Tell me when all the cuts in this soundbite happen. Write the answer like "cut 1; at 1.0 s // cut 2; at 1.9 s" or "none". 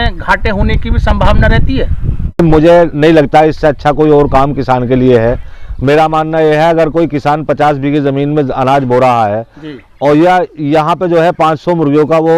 cut 1; at 2.4 s